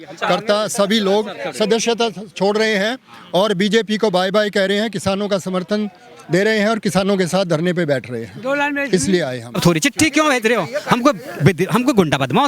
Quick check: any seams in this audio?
yes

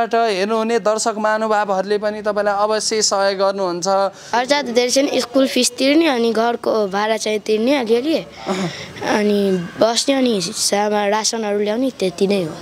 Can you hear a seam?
yes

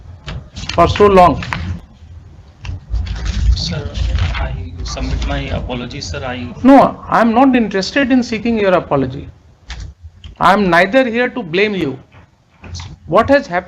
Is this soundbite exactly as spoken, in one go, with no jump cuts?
yes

